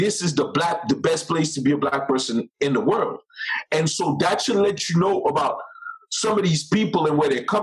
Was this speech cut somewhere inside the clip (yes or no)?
no